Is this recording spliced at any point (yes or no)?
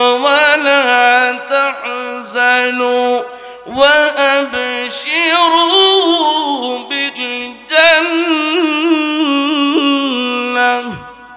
no